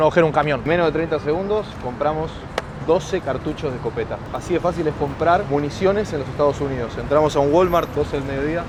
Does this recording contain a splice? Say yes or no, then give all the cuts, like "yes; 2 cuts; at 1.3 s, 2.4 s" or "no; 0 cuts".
no; 0 cuts